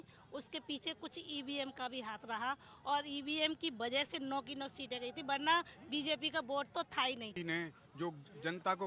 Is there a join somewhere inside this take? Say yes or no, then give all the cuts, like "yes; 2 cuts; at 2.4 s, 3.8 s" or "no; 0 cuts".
yes; 1 cut; at 7.4 s